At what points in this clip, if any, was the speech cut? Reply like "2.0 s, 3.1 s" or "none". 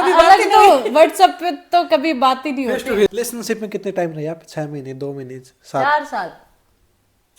3.1 s